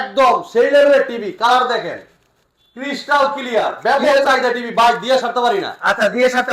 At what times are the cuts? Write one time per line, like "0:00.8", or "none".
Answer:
none